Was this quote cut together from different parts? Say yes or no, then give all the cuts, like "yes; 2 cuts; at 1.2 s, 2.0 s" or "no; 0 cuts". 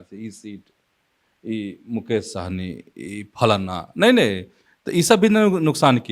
no; 0 cuts